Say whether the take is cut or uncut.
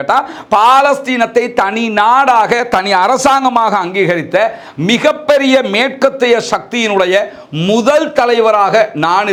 uncut